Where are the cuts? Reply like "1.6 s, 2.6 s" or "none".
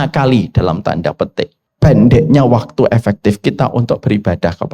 1.6 s